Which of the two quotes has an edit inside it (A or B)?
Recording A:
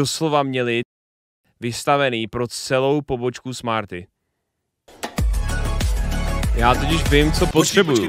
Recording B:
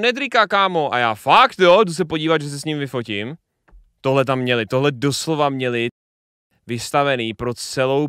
A